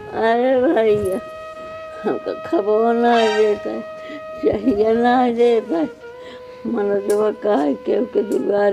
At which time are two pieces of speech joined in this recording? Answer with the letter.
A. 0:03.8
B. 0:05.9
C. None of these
C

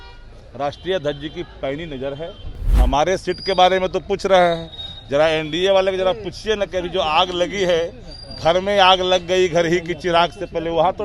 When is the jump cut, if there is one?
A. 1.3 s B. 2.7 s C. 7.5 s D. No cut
B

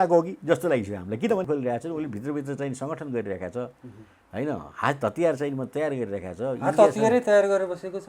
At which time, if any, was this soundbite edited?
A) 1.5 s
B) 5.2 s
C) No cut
A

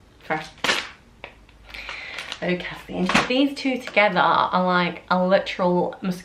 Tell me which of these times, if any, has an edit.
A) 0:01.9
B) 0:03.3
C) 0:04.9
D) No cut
B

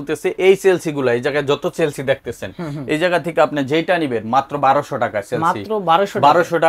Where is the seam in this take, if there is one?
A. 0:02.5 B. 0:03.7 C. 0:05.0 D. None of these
D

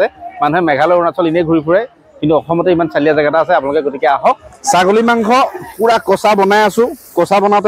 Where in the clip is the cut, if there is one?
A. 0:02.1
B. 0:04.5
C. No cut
B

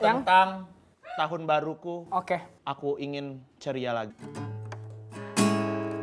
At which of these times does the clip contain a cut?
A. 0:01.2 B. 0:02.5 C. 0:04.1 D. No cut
C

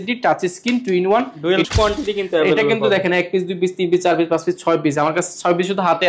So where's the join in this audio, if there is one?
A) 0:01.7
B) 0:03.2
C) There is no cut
A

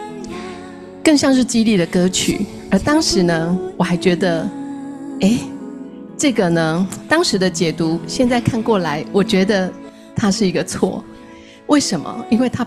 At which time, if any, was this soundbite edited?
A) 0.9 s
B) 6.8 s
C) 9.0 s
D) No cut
A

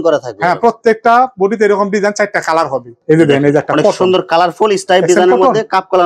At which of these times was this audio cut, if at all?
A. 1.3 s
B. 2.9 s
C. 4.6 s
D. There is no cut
B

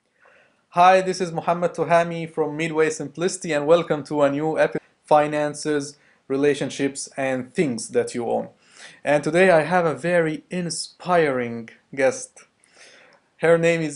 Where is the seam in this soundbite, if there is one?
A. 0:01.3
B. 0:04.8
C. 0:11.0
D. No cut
D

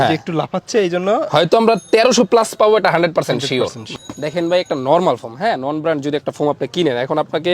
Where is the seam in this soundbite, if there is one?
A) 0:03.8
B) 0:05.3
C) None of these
A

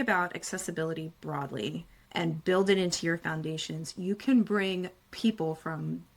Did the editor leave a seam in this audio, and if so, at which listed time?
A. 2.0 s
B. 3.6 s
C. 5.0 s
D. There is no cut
C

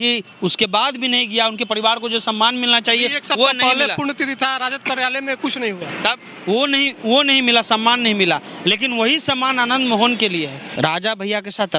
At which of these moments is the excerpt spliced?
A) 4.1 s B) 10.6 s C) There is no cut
B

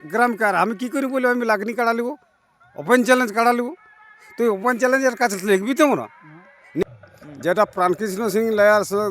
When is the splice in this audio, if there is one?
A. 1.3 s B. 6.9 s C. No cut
B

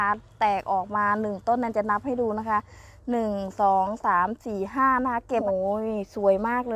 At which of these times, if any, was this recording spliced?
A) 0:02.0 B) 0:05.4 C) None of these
B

